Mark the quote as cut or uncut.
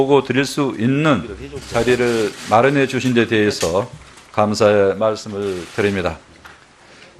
uncut